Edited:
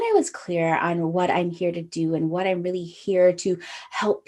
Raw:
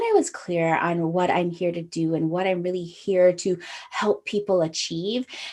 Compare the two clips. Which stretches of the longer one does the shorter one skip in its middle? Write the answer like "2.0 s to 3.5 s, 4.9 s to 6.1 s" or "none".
none